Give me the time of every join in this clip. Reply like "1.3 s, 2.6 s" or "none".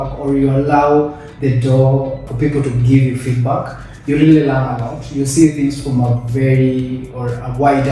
2.2 s